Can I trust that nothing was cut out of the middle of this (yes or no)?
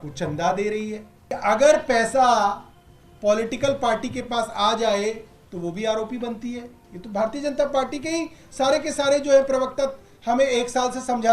no